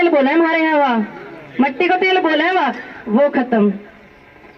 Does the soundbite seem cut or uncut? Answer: uncut